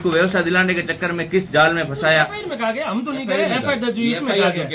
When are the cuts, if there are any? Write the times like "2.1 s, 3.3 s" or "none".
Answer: 2.3 s